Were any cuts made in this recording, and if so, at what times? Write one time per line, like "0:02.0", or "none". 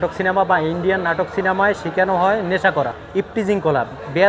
0:03.0